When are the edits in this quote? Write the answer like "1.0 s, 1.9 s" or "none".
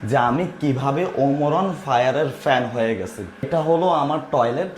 3.5 s